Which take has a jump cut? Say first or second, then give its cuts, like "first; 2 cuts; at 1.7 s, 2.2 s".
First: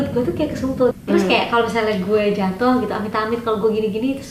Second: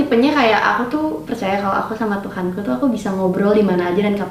first; 1 cut; at 0.9 s